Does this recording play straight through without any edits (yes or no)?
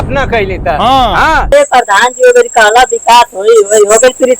no